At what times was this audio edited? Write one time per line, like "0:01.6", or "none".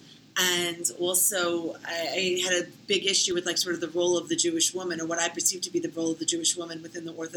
none